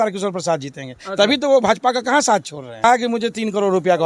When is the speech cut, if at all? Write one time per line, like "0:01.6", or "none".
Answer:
0:02.8